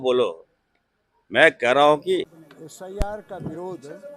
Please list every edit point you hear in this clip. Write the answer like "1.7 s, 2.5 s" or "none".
2.3 s